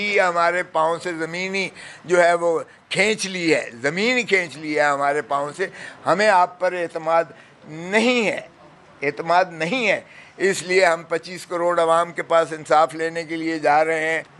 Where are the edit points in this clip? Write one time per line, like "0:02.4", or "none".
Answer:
none